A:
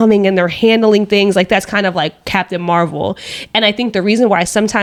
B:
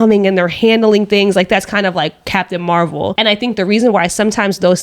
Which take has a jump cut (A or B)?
B